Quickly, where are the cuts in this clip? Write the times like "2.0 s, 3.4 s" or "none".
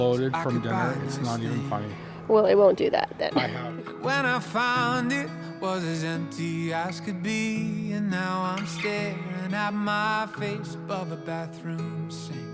3.8 s